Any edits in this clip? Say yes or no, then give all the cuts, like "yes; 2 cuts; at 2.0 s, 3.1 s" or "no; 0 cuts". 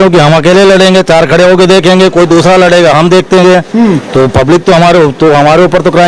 no; 0 cuts